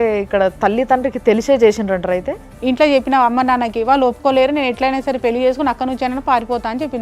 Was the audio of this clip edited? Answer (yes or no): yes